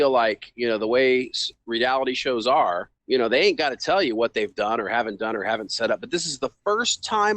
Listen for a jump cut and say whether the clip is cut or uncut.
cut